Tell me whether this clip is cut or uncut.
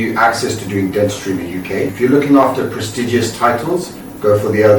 cut